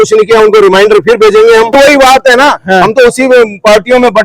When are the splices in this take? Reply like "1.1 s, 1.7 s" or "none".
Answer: 1.7 s